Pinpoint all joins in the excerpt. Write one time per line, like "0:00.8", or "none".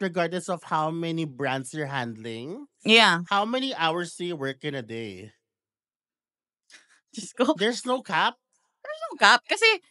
none